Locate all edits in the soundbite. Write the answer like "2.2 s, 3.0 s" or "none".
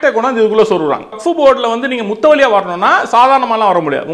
1.2 s